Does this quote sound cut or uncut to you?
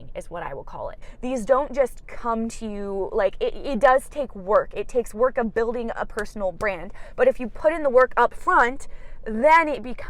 cut